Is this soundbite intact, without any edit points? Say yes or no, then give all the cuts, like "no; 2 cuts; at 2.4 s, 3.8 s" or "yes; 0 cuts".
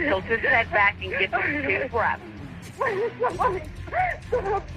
no; 1 cut; at 2.7 s